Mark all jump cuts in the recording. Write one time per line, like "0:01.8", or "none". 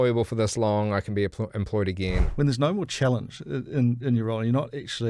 0:02.3